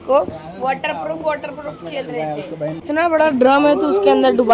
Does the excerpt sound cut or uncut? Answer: uncut